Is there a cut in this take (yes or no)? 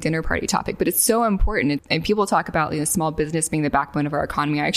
yes